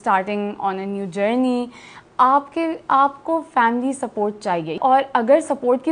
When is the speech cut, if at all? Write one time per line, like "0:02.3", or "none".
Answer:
0:04.8